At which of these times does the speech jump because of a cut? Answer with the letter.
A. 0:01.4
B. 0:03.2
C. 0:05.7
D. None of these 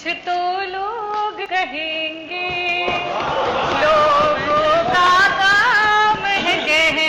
A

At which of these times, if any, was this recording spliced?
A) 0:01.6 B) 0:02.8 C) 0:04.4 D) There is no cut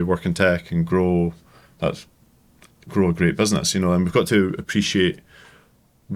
D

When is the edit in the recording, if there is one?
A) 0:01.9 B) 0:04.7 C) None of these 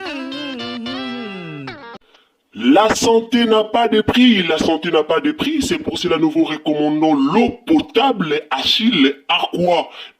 A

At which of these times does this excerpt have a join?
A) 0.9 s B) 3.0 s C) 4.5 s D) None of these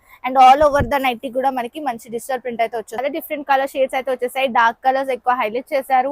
B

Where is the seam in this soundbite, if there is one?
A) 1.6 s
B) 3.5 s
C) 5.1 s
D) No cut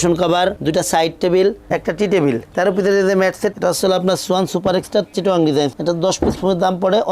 B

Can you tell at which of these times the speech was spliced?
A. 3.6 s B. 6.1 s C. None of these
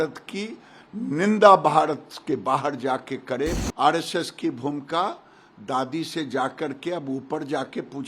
A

